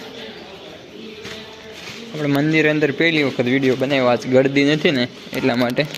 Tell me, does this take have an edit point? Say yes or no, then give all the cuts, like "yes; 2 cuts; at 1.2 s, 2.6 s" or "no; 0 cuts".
no; 0 cuts